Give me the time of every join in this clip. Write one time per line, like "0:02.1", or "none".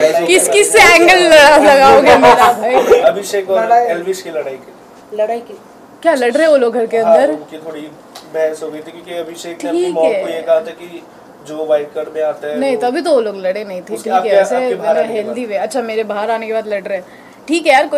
none